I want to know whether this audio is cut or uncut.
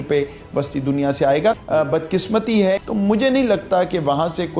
cut